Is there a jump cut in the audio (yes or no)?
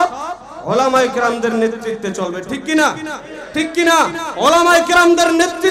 no